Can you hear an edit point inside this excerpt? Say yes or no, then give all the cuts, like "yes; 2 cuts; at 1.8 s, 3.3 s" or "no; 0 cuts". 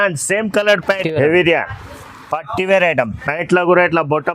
yes; 1 cut; at 1.0 s